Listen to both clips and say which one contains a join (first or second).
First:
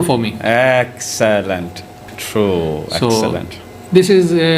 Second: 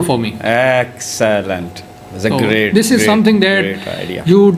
first